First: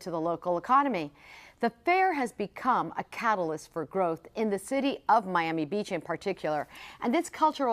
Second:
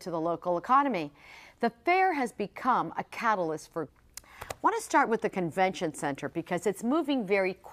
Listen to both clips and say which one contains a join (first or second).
first